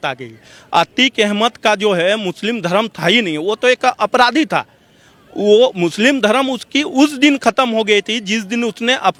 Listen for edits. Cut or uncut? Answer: uncut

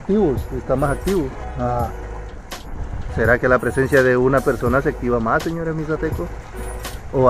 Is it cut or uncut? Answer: cut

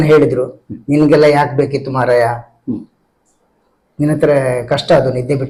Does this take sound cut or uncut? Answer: uncut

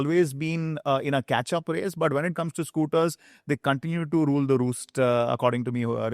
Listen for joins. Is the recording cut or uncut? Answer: uncut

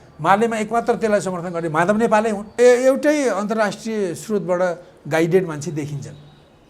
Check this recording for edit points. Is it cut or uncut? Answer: cut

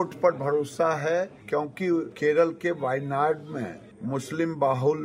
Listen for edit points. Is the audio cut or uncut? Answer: cut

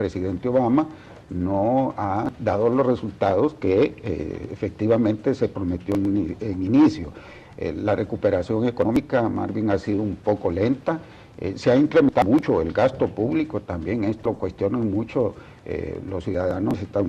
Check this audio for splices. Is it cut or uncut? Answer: cut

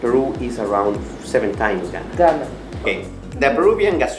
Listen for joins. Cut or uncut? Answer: cut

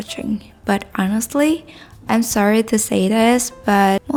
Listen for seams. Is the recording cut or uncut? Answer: uncut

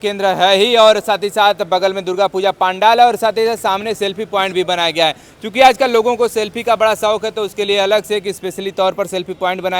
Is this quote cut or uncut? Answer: uncut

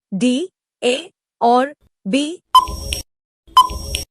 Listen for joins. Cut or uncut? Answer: cut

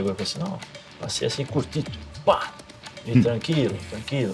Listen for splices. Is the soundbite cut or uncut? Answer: uncut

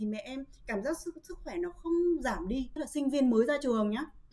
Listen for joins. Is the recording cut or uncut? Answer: cut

